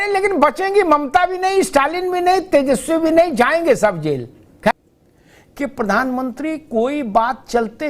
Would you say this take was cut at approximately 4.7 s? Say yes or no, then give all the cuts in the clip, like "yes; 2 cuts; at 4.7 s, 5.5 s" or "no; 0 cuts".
yes; 1 cut; at 4.7 s